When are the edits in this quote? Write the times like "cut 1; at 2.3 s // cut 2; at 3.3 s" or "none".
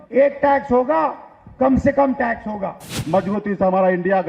cut 1; at 3.0 s